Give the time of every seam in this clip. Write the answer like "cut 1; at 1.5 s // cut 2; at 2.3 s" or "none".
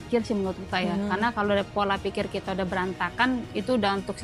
none